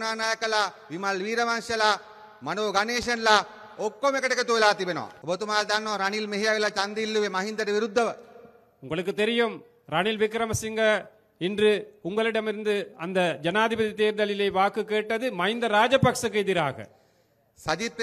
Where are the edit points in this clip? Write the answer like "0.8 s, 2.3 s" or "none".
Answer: 5.1 s

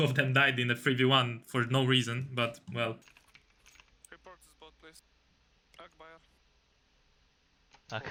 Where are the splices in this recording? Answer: none

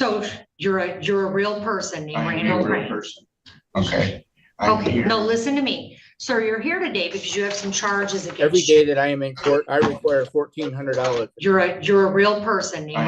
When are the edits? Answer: 8.3 s, 9.7 s, 11.3 s

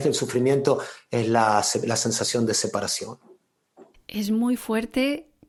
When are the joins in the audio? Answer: none

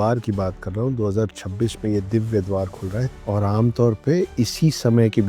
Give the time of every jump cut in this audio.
3.1 s

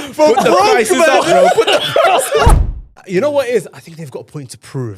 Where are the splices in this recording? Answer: 2.8 s

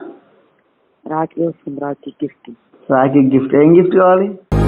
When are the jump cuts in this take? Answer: none

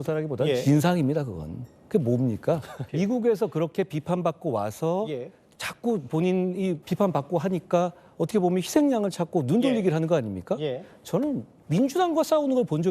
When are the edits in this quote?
2.8 s, 6.8 s, 11.5 s

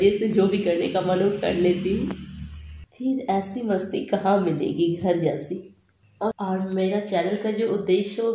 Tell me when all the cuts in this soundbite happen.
6.4 s

